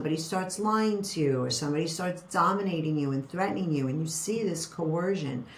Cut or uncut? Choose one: uncut